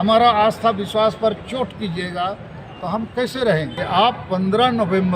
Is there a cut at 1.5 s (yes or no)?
no